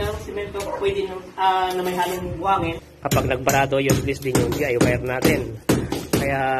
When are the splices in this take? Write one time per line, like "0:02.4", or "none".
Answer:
0:02.9